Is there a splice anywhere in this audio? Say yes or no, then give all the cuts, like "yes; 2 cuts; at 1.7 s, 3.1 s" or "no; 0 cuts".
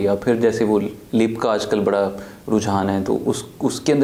no; 0 cuts